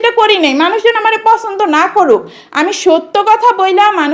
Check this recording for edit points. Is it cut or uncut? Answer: uncut